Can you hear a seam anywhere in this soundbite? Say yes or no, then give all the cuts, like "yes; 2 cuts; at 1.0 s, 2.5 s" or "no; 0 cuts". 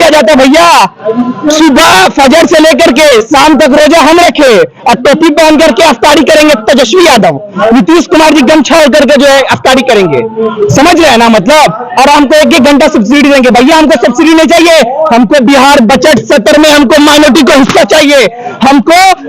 no; 0 cuts